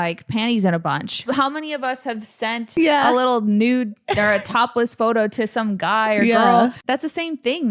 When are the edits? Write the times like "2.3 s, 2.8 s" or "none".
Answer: 1.3 s, 2.7 s, 6.8 s